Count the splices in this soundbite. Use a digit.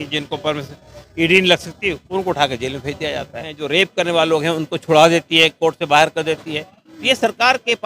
1